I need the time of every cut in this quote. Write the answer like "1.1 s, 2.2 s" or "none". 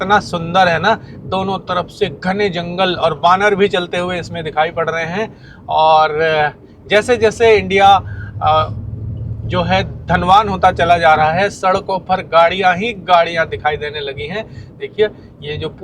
none